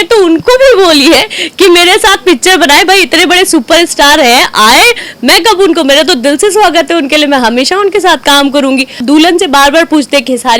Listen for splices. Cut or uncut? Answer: cut